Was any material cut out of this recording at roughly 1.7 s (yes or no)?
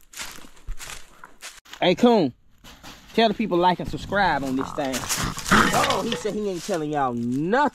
yes